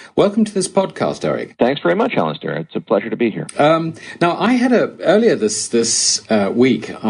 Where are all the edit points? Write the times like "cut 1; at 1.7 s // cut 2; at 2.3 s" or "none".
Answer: cut 1; at 2.5 s